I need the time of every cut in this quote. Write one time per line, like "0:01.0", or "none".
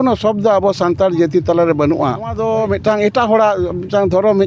0:02.4